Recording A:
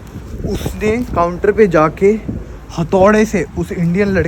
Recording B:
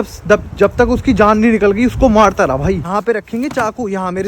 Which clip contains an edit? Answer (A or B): B